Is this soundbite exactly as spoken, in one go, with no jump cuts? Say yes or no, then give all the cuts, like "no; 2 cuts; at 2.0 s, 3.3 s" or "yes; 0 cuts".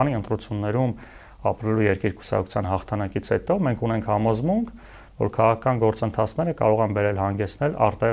yes; 0 cuts